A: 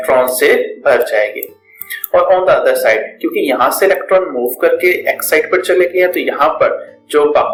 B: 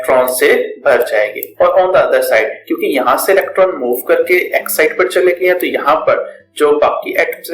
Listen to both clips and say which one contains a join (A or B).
B